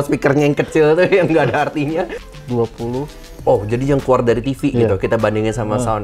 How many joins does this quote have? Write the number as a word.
one